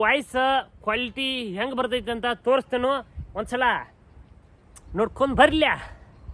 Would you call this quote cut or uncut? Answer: uncut